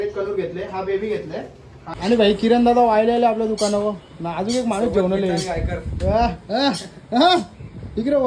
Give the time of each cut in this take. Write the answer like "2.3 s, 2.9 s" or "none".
1.8 s